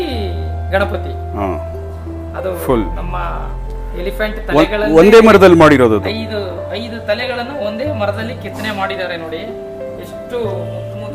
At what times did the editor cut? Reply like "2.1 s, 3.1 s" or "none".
none

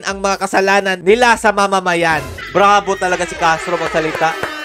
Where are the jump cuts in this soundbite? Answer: none

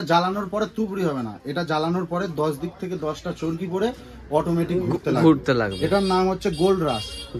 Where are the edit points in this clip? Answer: none

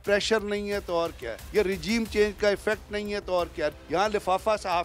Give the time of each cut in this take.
1.4 s, 3.8 s

